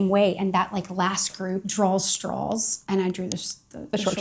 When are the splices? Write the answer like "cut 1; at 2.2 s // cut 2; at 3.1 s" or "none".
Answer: cut 1; at 1.7 s // cut 2; at 2.7 s